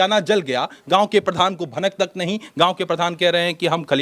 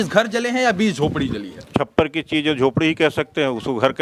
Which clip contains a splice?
second; 1 cut; at 1.7 s

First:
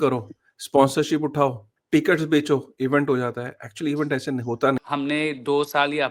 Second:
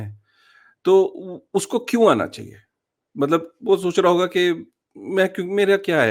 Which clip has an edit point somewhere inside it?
first; 1 cut; at 4.8 s

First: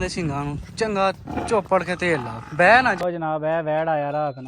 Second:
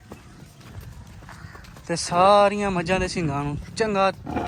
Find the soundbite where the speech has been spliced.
first; 1 cut; at 3.0 s

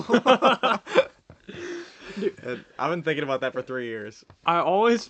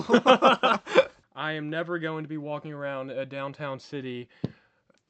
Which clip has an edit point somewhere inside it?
second; 1 cut; at 1.2 s

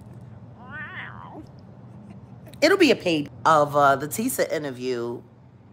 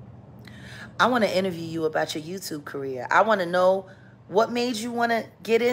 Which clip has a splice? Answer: first; 1 cut; at 3.3 s

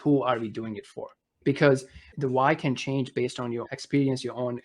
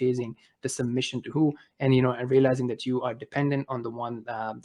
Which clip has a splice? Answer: first; 3 cuts; at 1.4 s, 2.1 s, 3.6 s

